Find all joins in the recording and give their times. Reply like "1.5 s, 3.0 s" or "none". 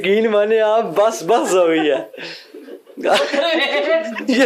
none

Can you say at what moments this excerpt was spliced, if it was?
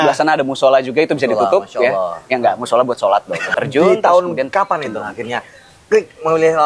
3.5 s

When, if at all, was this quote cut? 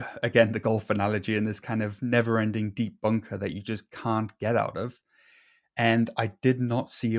none

